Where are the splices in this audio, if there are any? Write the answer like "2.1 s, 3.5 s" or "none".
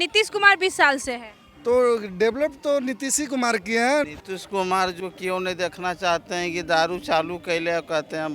4.0 s